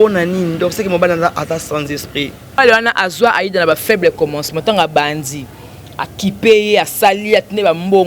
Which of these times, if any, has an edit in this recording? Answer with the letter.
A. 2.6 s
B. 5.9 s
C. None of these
A